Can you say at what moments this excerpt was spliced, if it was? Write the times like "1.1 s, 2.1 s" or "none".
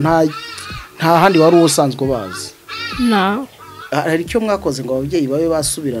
3.8 s